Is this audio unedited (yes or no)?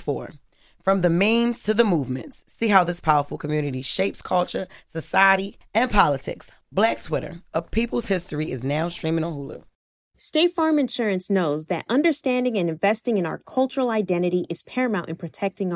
no